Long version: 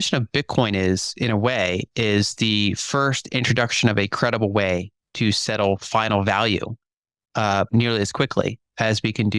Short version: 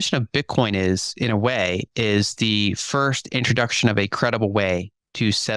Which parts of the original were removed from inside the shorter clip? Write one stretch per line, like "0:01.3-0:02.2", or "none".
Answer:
none